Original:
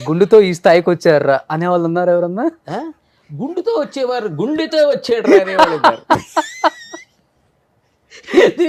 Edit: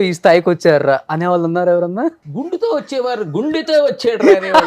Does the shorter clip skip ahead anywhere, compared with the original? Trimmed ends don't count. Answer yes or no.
yes